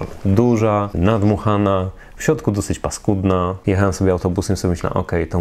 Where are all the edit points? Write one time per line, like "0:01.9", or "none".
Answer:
0:00.9
0:03.6